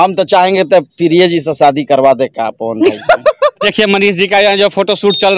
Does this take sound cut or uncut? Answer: cut